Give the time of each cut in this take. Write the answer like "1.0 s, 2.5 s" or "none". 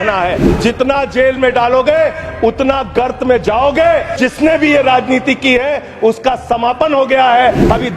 4.1 s